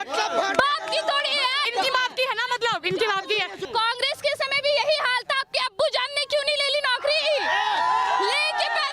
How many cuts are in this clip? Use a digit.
2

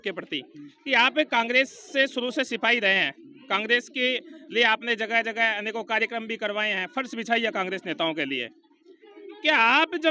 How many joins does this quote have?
0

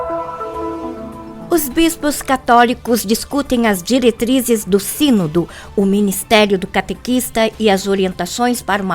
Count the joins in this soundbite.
1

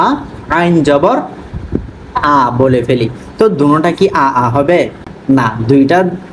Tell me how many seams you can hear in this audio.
1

